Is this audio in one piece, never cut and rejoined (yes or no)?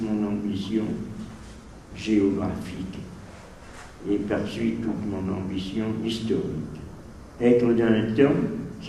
yes